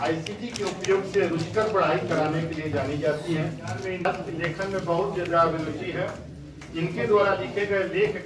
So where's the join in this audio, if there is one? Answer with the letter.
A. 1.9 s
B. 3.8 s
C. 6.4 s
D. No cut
B